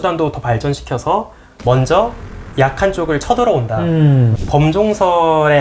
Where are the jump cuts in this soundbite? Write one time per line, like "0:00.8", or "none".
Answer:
0:04.4